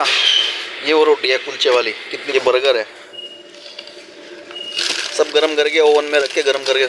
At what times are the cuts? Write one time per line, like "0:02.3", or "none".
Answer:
0:02.1